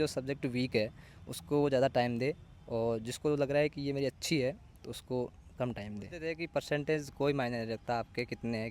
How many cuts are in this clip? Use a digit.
1